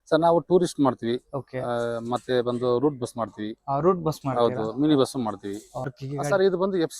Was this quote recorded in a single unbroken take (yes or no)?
no